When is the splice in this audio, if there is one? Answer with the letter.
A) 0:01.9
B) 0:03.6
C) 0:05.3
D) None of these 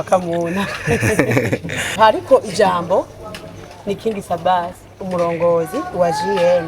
A